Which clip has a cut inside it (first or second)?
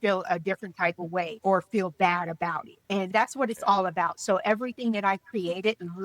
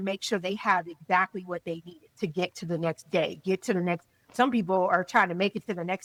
first